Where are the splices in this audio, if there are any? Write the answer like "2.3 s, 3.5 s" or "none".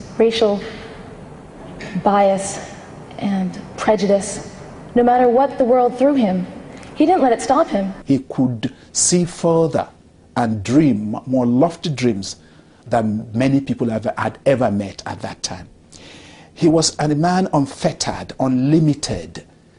5.5 s